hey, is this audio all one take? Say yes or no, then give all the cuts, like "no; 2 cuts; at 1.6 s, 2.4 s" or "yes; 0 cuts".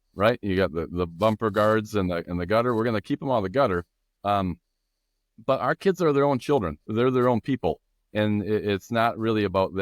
yes; 0 cuts